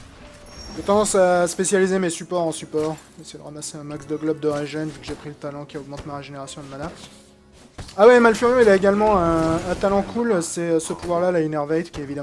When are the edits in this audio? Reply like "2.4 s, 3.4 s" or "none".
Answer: none